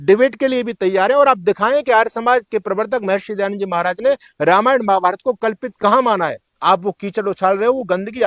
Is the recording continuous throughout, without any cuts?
no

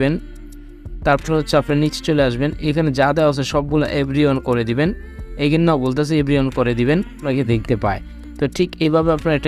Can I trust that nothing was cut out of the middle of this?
no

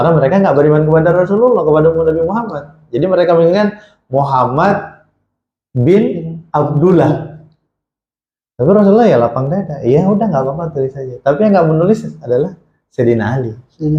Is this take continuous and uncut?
yes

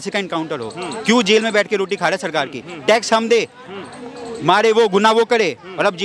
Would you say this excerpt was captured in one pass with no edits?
yes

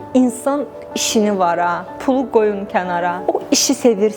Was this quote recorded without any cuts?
no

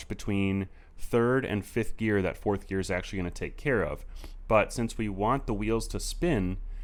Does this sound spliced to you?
no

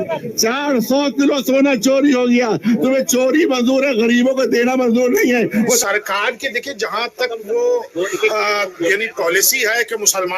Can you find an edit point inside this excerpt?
yes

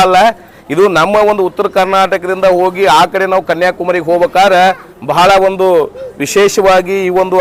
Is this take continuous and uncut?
yes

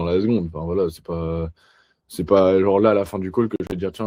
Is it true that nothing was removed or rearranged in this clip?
yes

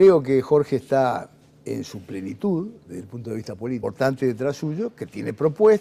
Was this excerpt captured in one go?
yes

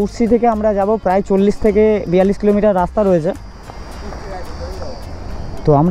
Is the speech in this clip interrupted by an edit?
no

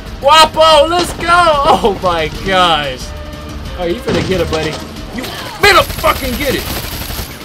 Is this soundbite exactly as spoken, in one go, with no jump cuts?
yes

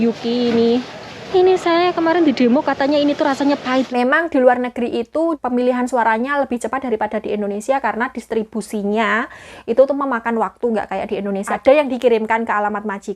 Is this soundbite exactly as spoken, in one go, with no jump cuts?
no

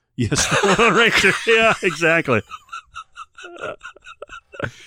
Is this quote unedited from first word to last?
yes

